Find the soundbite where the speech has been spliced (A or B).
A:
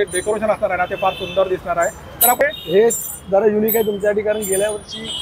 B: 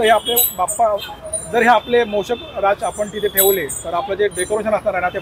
A